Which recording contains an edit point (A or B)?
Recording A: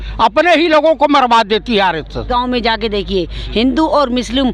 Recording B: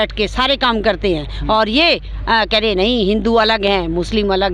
A